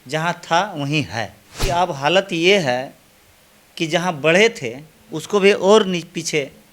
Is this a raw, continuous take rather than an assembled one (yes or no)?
no